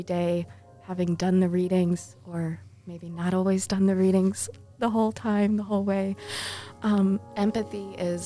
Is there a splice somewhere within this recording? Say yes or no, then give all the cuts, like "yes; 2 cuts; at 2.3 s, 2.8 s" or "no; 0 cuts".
yes; 1 cut; at 7.3 s